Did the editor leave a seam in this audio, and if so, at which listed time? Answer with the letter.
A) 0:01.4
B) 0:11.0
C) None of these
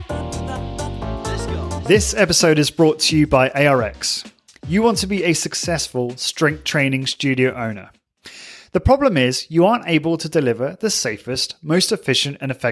A